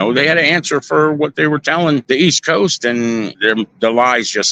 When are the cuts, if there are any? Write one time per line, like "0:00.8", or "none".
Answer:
0:02.0
0:03.3